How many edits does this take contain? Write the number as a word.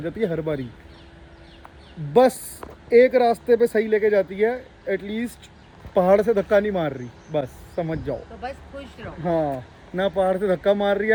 zero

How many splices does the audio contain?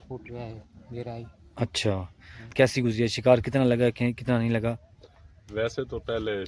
one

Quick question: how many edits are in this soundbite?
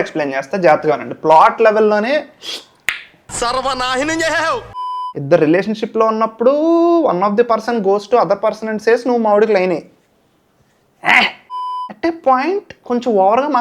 two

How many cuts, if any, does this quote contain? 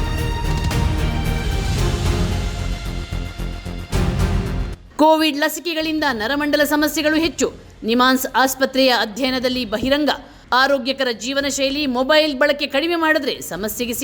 one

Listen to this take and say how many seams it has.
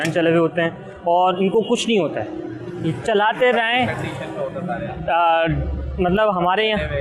zero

